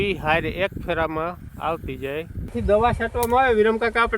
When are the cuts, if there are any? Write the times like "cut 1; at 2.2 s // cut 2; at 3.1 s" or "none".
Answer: cut 1; at 2.5 s